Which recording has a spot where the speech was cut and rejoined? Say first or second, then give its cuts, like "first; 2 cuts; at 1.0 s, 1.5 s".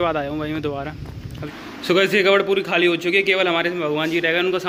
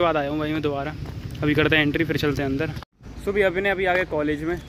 first; 1 cut; at 1.3 s